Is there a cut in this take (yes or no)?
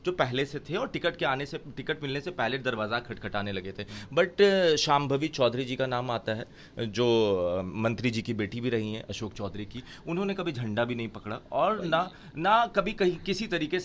no